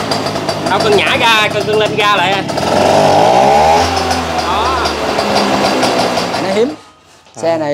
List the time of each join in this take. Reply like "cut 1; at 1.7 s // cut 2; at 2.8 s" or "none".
cut 1; at 6.4 s